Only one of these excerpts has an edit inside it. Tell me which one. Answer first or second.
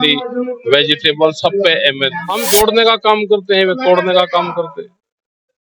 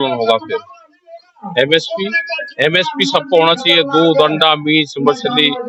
first